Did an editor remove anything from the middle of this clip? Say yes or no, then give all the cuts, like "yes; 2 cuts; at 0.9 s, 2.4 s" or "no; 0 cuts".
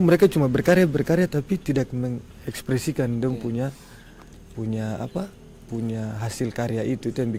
no; 0 cuts